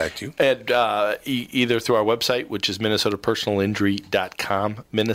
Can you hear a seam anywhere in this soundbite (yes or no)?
no